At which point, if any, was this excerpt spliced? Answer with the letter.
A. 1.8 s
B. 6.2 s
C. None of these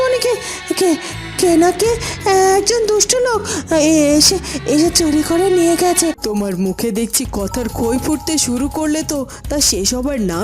B